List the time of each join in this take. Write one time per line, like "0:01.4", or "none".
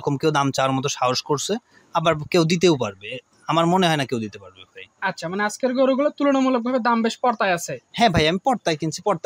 none